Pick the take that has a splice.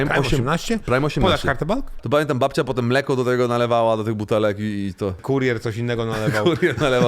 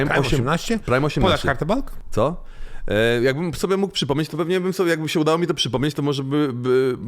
first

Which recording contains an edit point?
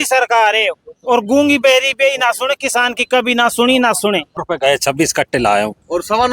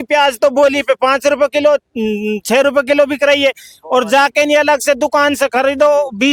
first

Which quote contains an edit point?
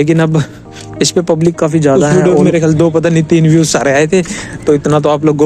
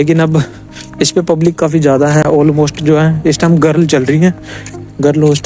first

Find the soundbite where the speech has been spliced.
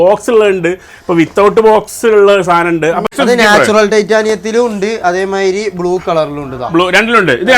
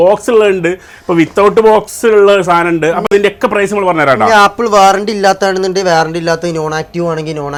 first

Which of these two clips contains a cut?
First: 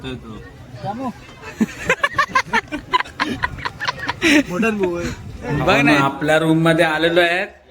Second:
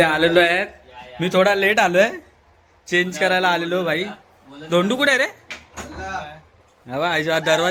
first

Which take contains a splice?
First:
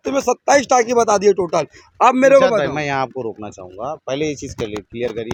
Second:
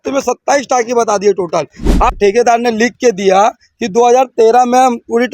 second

